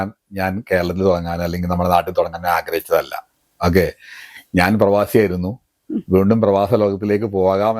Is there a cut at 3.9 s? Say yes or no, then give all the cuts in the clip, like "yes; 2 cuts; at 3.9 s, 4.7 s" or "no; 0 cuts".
no; 0 cuts